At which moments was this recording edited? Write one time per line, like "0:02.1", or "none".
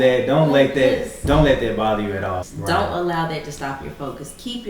0:02.4